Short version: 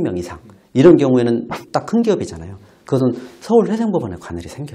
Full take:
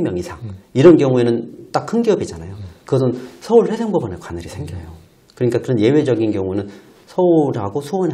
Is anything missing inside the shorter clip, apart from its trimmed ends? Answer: no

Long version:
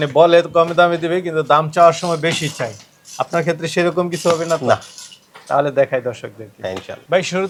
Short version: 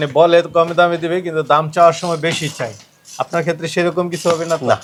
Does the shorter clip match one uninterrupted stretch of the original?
yes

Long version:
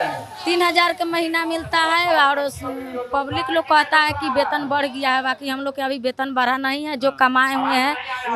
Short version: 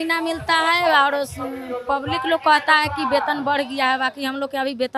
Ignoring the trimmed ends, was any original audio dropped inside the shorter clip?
no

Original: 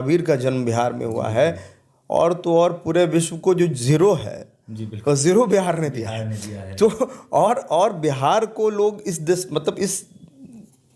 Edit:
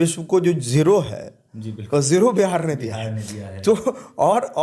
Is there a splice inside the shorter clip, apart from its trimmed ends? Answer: no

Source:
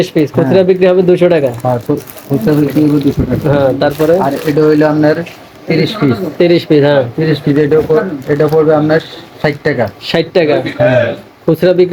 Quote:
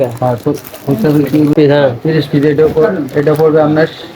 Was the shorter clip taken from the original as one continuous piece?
no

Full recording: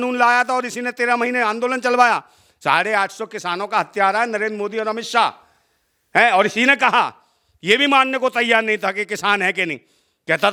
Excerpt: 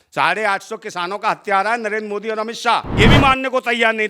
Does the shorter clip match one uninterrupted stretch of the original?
no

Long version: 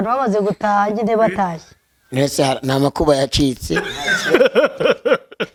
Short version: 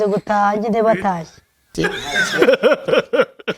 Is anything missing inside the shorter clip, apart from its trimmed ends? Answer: yes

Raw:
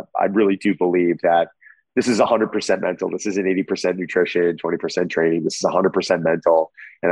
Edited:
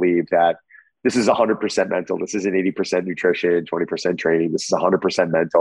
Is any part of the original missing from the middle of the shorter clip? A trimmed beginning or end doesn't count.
no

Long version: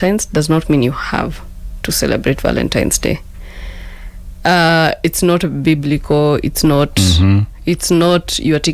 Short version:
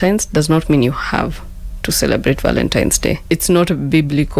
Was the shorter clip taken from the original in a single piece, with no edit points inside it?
no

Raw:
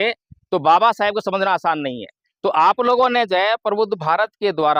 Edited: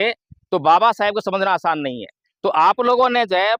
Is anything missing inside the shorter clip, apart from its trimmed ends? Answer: no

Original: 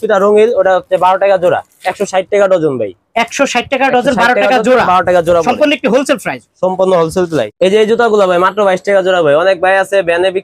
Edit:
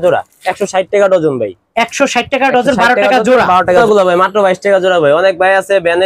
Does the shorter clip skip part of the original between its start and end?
yes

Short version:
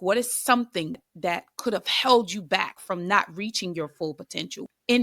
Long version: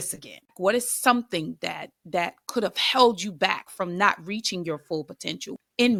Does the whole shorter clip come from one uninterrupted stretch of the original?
no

